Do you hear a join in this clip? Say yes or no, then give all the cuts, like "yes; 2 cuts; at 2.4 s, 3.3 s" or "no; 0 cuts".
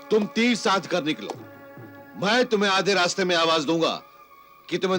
no; 0 cuts